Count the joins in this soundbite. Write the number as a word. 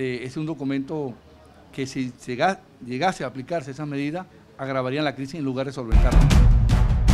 one